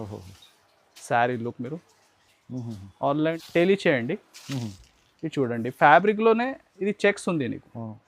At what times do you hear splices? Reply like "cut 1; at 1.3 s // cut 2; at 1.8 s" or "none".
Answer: cut 1; at 3.4 s